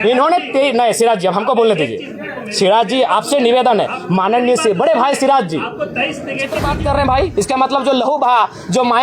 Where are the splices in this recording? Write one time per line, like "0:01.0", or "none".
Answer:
0:06.6